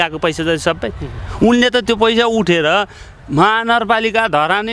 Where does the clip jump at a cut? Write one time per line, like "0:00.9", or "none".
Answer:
none